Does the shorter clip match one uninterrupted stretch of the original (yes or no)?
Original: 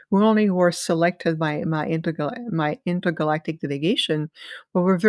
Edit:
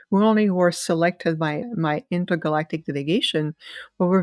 no